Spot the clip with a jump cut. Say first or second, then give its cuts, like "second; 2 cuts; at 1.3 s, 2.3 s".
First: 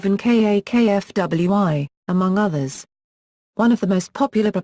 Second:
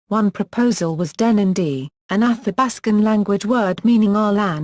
second; 1 cut; at 3.7 s